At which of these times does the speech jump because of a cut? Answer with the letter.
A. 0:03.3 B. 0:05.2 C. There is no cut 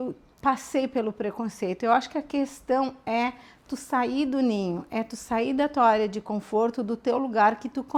C